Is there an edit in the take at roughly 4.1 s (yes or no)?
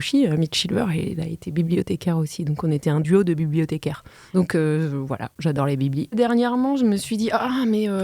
yes